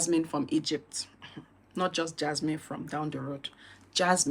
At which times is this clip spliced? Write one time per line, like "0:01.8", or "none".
none